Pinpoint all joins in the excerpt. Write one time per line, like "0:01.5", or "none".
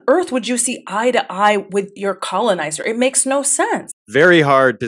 none

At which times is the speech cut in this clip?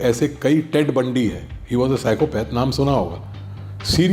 none

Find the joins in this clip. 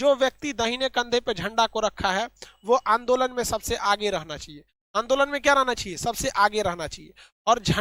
none

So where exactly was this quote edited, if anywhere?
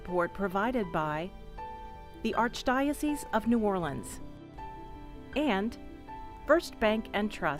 none

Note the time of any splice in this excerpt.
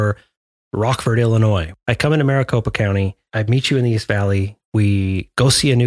0:01.7

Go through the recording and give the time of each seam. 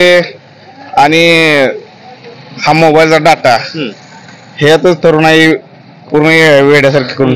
none

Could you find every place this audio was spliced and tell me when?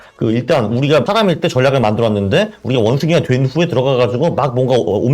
0:01.1

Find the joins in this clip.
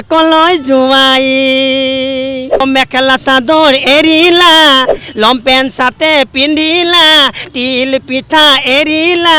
0:02.6

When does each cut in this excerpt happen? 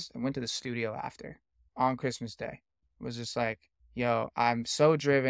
0:01.7
0:02.8
0:03.7

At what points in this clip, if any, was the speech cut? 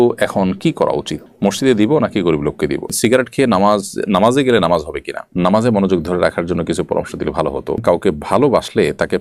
0:02.9
0:05.3
0:07.8

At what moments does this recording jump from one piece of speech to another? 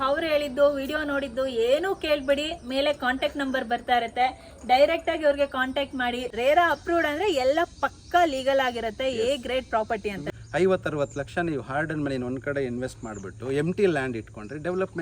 0:06.3
0:10.2

